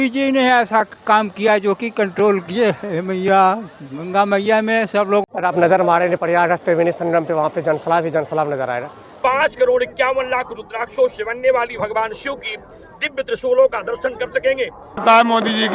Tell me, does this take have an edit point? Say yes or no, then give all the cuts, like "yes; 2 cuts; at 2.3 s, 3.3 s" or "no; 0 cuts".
yes; 3 cuts; at 5.2 s, 9.0 s, 15.0 s